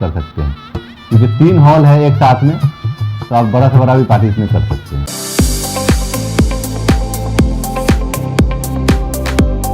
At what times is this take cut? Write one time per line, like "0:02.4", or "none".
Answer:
0:05.0